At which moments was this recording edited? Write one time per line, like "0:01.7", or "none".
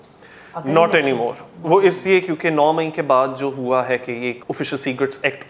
0:04.4